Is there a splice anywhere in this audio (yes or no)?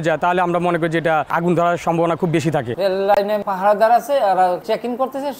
yes